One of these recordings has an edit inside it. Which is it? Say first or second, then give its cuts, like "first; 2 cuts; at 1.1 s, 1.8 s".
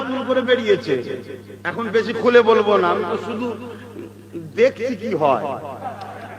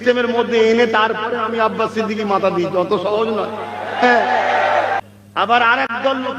second; 1 cut; at 5.2 s